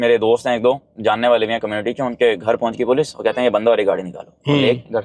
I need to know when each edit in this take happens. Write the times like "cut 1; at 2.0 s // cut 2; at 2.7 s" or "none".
none